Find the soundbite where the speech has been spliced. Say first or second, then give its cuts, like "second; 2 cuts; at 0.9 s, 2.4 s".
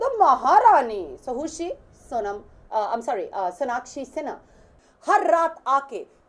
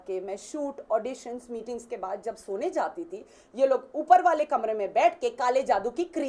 first; 1 cut; at 4.8 s